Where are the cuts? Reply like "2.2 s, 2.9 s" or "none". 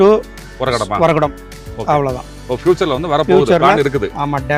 none